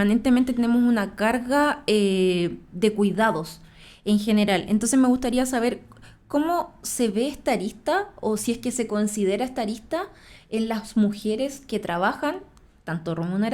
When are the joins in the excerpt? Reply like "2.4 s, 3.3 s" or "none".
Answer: none

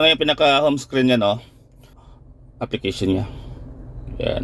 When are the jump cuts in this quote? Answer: 1.8 s

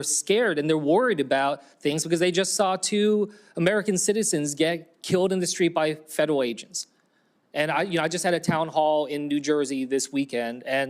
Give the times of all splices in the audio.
7.8 s

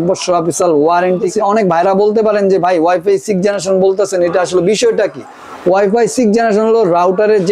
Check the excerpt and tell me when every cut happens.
1.3 s

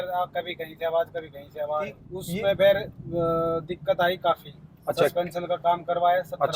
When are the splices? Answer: 2.1 s

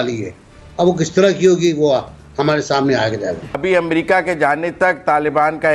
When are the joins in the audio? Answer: 3.6 s

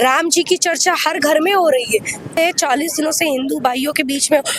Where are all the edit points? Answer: 2.4 s

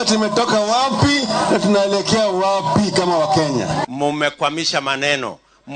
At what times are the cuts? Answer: 3.8 s

